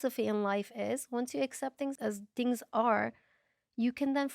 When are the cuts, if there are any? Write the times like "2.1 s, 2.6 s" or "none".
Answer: 1.9 s